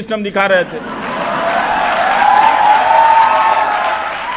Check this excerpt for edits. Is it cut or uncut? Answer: uncut